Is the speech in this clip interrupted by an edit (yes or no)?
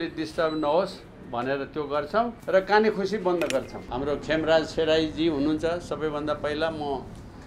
yes